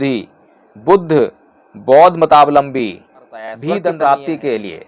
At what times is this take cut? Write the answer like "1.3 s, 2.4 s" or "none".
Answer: 3.7 s